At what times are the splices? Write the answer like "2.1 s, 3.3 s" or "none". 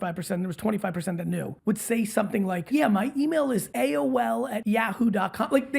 1.5 s, 2.6 s, 3.7 s, 4.6 s